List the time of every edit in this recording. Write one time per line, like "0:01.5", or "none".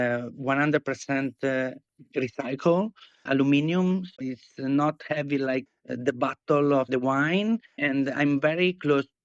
0:04.1
0:05.8
0:07.8